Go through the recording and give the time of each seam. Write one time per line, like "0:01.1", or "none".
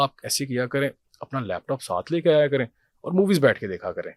none

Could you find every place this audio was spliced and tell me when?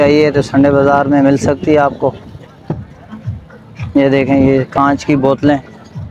none

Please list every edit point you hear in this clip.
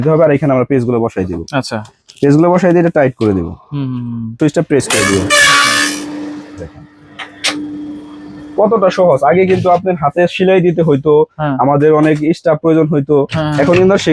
0:04.4

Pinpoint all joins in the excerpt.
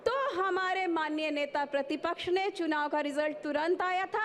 none

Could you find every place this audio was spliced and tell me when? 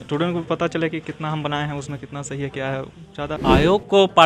0:03.4

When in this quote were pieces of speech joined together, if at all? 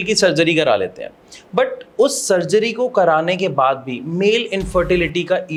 none

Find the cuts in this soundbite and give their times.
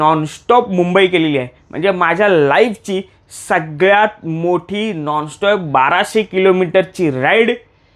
none

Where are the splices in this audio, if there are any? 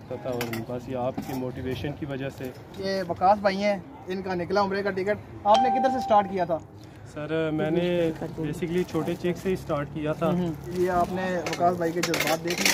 0:02.8
0:10.7

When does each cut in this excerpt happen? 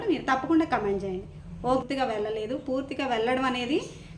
0:01.8

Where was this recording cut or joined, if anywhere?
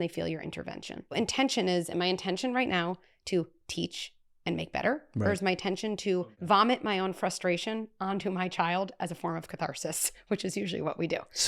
0:01.2
0:06.2

